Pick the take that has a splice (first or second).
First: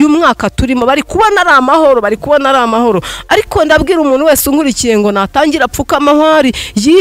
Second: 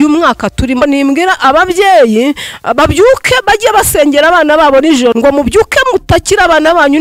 second